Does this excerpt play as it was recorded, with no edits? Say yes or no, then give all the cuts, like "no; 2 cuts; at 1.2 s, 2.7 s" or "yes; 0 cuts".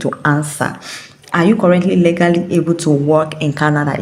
yes; 0 cuts